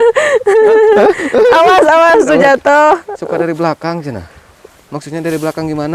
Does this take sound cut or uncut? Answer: uncut